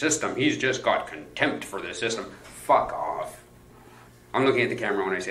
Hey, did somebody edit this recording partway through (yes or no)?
no